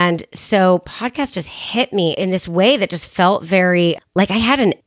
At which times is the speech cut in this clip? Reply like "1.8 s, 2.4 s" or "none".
2.1 s